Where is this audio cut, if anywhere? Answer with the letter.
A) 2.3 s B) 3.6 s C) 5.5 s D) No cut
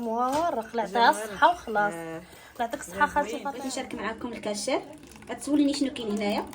B